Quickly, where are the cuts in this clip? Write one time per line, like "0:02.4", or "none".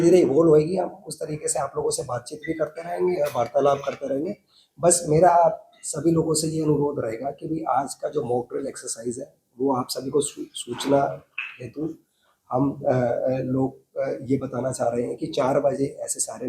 none